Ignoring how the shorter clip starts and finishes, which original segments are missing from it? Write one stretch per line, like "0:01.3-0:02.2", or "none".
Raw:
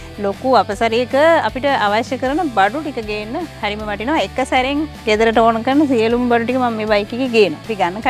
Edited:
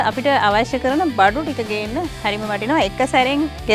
none